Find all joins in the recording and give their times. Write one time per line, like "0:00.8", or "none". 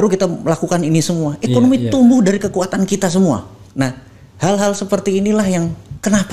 none